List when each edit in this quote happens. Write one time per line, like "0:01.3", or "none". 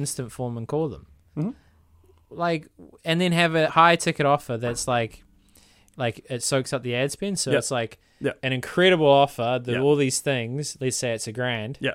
none